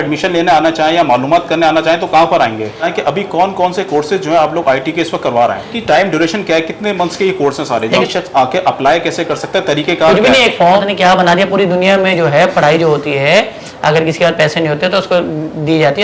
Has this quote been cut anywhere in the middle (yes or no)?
yes